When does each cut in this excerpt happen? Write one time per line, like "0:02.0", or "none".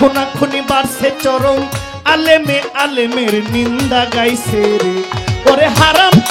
none